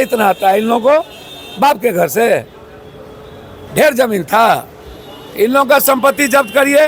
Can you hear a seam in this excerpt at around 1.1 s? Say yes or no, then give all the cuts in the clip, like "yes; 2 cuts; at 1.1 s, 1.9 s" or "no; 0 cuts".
no; 0 cuts